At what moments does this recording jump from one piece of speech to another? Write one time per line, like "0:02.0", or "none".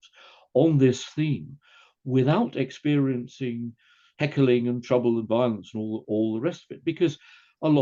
none